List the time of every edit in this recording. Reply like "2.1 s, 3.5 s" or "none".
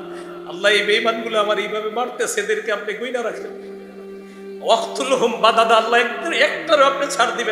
none